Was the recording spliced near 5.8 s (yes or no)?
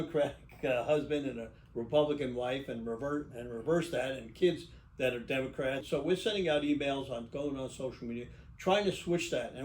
yes